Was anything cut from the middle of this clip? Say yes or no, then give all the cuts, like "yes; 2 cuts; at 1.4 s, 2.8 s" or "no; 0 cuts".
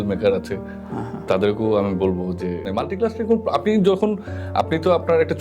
yes; 1 cut; at 2.5 s